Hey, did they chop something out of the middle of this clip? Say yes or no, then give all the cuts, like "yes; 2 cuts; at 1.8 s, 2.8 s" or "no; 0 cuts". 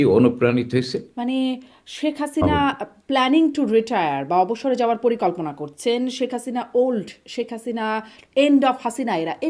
no; 0 cuts